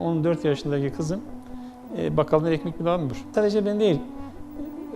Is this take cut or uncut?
uncut